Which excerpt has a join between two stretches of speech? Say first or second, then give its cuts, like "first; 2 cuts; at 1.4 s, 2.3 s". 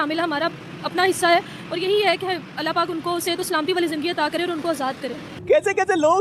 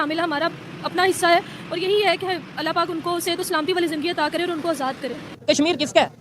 second; 1 cut; at 5.3 s